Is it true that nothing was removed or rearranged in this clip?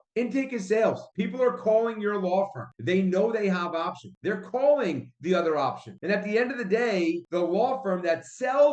yes; 0 cuts

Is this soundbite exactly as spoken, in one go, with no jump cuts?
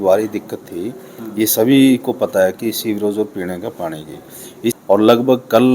no; 1 cut; at 4.8 s

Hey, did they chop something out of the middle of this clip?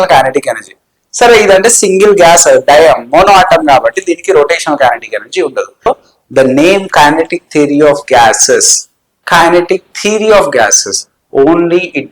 yes; 1 cut; at 5.9 s

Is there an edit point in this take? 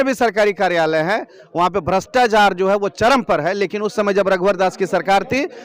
no; 0 cuts

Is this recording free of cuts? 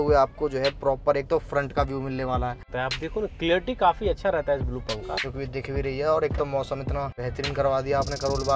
no; 3 cuts; at 2.7 s, 5.7 s, 7.2 s

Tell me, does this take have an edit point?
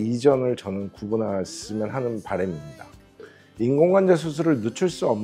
yes; 1 cut; at 3.2 s

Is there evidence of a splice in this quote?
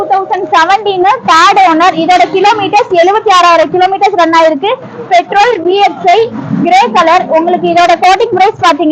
no; 0 cuts

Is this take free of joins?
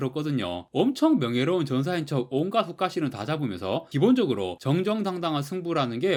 yes; 0 cuts

